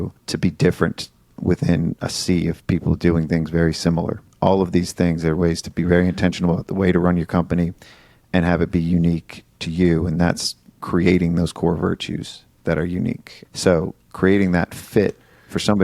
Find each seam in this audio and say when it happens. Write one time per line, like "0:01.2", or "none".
none